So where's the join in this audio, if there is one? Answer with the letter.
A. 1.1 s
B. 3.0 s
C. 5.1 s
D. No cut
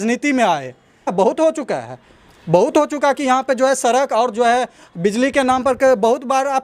A